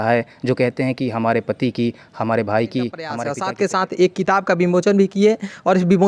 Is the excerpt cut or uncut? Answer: cut